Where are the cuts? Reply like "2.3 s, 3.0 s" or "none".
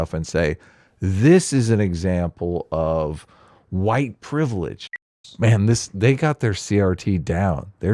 4.9 s